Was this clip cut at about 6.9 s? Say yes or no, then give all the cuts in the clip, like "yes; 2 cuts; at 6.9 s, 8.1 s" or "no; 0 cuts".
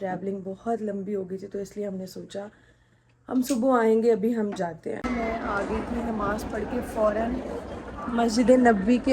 no; 1 cut; at 5.0 s